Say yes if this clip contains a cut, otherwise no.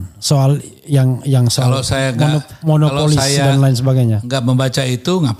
no